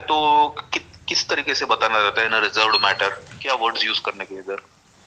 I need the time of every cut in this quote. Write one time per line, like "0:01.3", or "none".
0:03.3